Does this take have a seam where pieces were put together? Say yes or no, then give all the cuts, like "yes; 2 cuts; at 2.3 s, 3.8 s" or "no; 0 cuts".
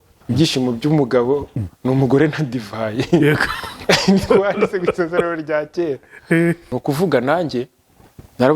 yes; 1 cut; at 6.7 s